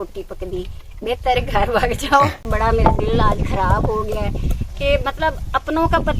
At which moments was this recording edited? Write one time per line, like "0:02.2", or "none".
0:02.5